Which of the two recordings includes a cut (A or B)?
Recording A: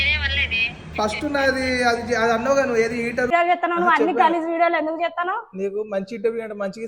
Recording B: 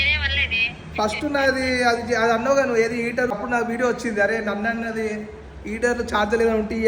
A